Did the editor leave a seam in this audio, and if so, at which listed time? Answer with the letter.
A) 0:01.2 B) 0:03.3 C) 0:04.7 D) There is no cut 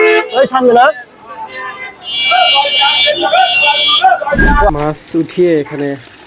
C